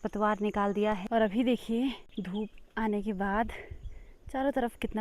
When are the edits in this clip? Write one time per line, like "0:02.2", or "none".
0:01.0
0:02.1